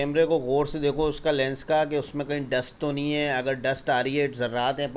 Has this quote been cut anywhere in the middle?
no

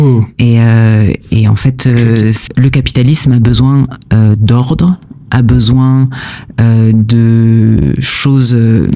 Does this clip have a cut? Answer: yes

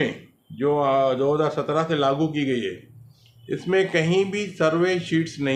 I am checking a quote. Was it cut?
no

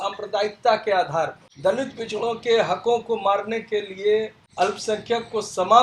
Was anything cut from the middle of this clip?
yes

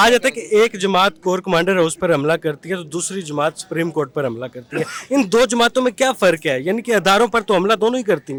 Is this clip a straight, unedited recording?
yes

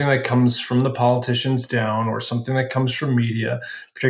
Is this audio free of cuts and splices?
yes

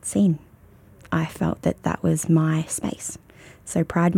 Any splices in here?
no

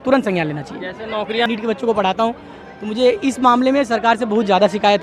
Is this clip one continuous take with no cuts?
no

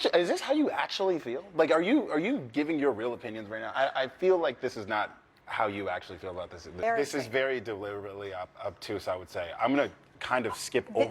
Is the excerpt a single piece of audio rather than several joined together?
no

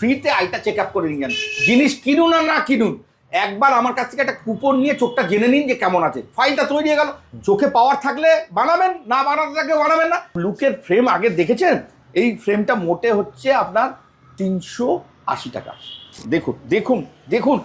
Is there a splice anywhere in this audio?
yes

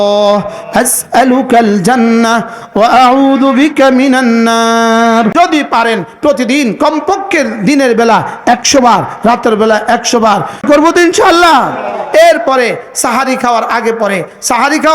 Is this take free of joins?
no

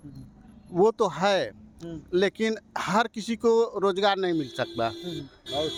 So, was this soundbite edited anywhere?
no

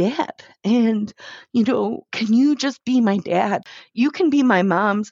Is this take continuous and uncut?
no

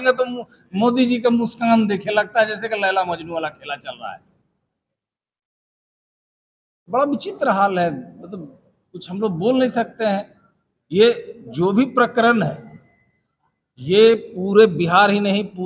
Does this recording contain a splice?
no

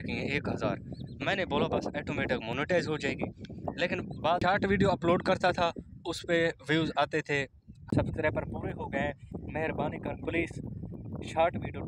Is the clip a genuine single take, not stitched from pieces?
no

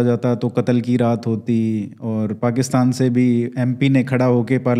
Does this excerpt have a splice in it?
no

